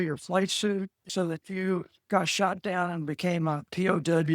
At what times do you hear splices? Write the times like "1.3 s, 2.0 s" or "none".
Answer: 1.1 s